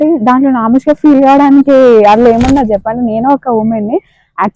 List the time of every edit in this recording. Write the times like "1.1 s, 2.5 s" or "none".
none